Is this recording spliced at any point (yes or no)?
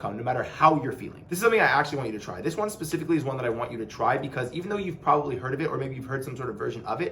yes